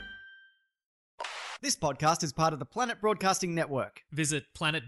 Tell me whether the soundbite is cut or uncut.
cut